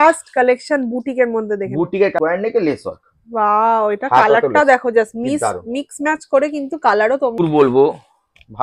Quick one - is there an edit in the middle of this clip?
yes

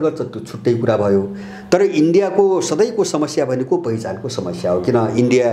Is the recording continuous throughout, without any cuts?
yes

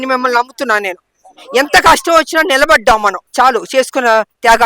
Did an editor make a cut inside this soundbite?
yes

